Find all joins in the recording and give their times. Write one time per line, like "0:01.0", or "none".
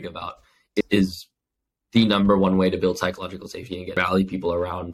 0:00.8
0:04.0